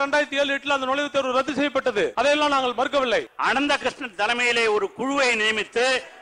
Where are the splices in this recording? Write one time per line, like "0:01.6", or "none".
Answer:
0:02.1
0:03.3